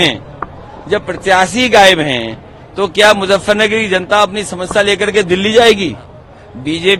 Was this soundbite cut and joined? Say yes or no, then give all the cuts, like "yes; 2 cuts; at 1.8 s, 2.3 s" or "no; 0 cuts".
no; 0 cuts